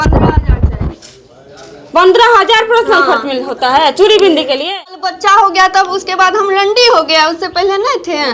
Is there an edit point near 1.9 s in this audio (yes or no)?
no